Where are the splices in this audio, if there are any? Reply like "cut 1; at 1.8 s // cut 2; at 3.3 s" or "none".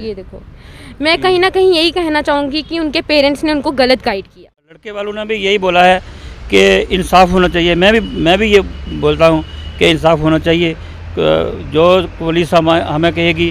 cut 1; at 5.0 s